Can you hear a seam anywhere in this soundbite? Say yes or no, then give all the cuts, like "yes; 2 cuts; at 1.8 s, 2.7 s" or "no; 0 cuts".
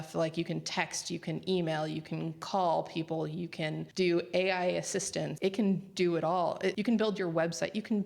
yes; 3 cuts; at 3.8 s, 5.3 s, 6.8 s